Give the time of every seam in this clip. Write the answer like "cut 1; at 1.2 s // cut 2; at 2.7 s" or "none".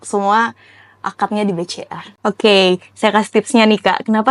cut 1; at 2.2 s

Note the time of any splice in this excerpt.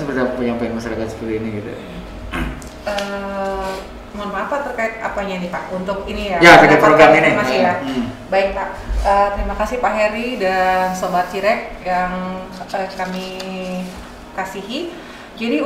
none

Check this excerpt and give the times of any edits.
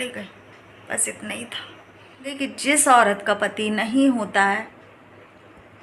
cut 1; at 2.3 s

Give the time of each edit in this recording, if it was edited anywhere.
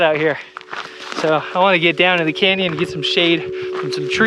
none

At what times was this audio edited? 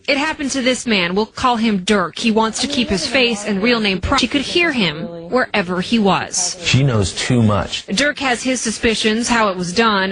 cut 1; at 5.3 s

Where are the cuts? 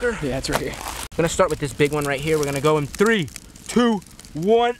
cut 1; at 1.2 s

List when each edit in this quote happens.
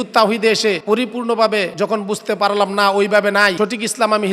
cut 1; at 0.8 s // cut 2; at 1.7 s // cut 3; at 3.5 s

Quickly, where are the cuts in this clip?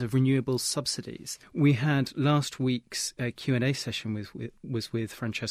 none

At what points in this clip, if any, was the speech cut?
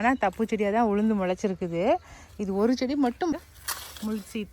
cut 1; at 3.3 s

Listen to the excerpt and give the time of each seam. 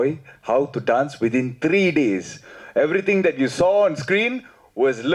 none

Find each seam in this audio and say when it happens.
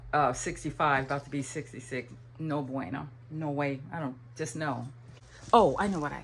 cut 1; at 5.3 s

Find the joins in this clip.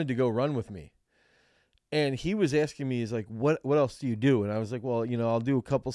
none

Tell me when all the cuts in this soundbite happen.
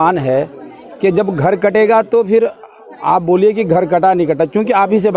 none

